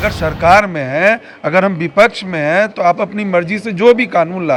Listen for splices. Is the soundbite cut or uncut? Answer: uncut